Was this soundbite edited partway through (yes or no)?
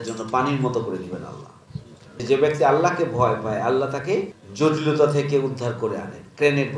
yes